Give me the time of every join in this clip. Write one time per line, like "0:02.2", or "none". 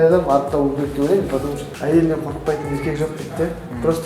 0:01.7